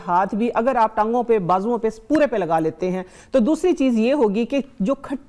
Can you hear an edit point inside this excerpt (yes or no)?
no